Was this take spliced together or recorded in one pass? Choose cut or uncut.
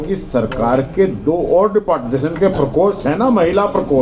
uncut